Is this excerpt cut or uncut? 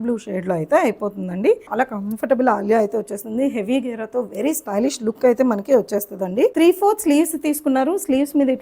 cut